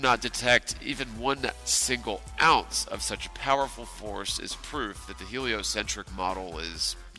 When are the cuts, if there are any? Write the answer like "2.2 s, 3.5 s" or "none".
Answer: 5.6 s